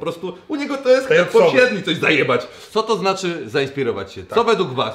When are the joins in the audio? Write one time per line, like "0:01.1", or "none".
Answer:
0:02.6